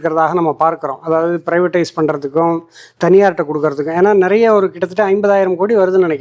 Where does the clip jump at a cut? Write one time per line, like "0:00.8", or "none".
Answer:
none